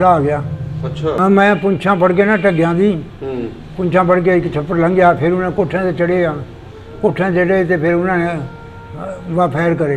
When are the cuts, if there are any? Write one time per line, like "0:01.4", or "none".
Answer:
0:01.2